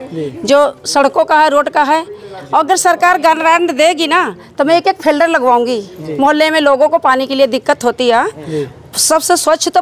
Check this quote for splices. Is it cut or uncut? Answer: uncut